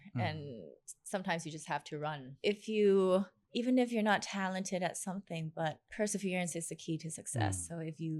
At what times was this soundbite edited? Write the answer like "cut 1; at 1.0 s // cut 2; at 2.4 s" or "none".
cut 1; at 2.3 s // cut 2; at 3.4 s // cut 3; at 5.8 s